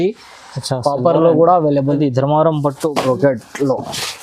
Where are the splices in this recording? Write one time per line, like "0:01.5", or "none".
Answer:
0:02.0